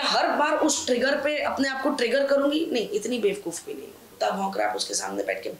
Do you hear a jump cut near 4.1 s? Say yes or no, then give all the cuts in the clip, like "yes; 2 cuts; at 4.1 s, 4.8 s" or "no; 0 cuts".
yes; 1 cut; at 4.1 s